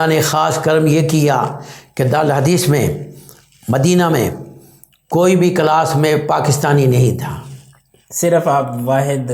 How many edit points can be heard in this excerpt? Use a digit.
0